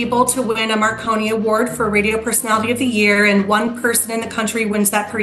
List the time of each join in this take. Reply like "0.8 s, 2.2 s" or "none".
none